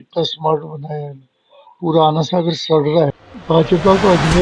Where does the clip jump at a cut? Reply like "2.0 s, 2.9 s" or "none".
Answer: 3.2 s